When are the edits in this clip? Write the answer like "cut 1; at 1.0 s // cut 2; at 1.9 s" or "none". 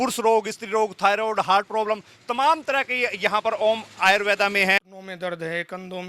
cut 1; at 4.8 s